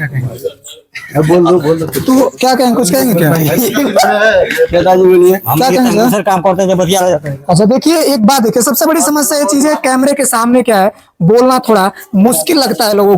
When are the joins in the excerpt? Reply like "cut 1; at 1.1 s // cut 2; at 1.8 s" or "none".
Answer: none